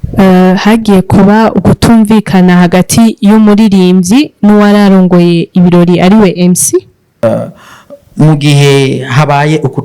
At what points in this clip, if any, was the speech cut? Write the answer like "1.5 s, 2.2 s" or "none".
7.2 s